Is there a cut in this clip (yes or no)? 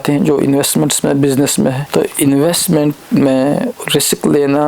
yes